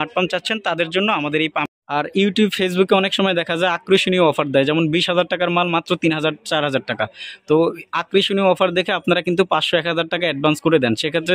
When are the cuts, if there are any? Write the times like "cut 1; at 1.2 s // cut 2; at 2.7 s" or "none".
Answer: cut 1; at 1.6 s